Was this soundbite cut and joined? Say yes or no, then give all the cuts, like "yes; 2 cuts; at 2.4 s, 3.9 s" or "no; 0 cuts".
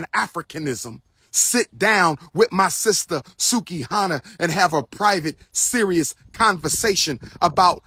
no; 0 cuts